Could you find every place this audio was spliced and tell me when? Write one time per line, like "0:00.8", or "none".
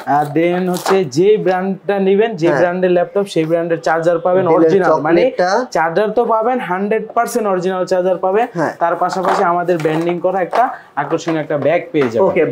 none